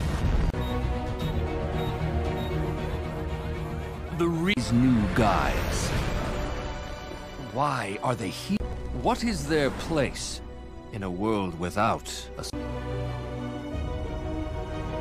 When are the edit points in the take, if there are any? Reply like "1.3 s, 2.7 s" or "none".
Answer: 8.8 s

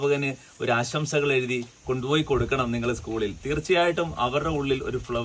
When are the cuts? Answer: none

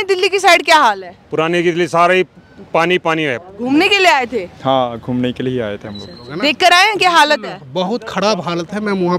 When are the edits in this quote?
3.5 s, 6.2 s

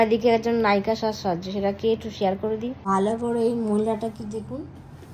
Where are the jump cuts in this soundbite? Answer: none

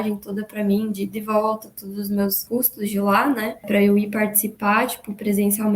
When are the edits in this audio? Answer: 2.4 s, 3.6 s

